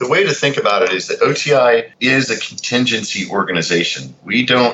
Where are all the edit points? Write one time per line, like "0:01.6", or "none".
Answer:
0:01.9